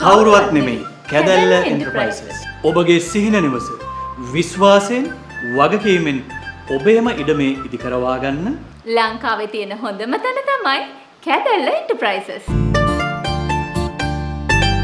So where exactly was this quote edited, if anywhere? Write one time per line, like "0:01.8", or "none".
none